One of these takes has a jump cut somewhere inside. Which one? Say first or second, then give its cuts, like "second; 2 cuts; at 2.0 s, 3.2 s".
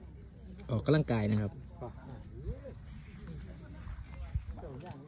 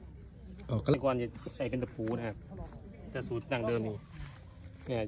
second; 1 cut; at 0.9 s